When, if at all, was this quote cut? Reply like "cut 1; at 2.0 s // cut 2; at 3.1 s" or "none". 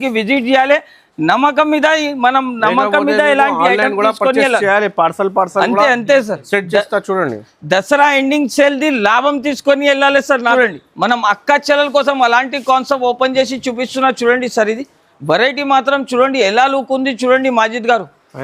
cut 1; at 10.5 s